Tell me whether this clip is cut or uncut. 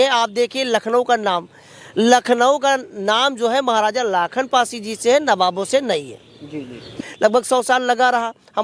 cut